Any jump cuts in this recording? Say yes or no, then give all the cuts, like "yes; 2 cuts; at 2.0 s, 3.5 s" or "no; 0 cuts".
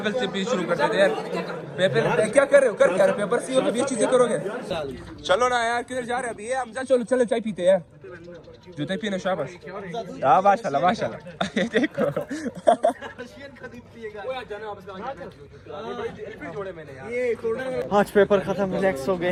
no; 0 cuts